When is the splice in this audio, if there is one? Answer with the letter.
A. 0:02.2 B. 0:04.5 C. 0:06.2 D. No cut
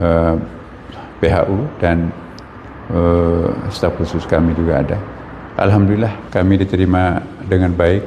C